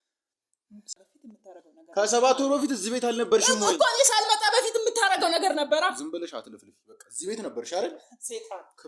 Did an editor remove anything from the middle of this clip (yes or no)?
yes